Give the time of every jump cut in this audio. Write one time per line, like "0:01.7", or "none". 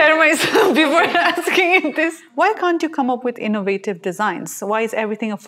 0:02.2

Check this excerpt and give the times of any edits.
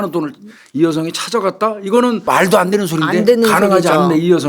0:02.2

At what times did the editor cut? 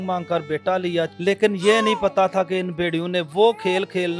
0:01.1
0:03.3

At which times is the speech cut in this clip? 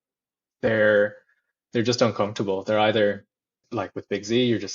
0:03.6

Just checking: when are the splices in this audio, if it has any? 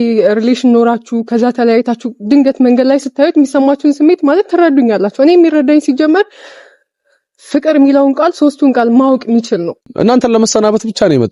0:10.2

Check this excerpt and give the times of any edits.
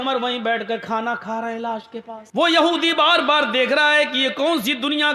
0:02.2

